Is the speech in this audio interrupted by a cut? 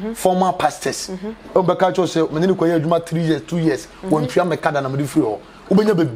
no; 0 cuts

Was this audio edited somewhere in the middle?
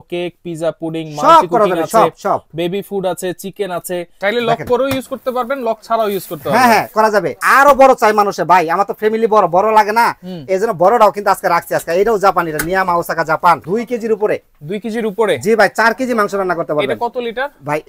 yes; 3 cuts; at 4.1 s, 7.4 s, 13.6 s

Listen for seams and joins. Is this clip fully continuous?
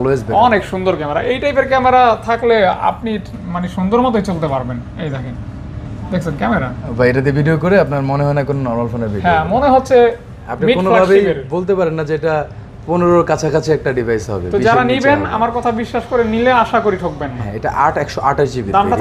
yes; 0 cuts

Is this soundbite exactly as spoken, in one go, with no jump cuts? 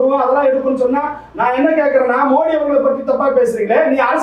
yes; 0 cuts

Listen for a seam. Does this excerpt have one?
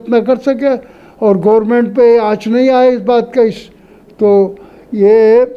no; 0 cuts

